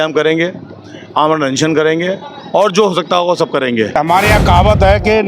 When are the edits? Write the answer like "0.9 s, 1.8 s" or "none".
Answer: 4.0 s